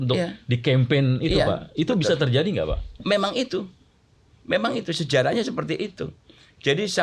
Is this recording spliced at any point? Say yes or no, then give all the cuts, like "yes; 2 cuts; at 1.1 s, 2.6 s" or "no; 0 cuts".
no; 0 cuts